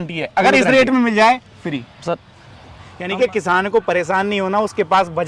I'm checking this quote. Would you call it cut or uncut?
cut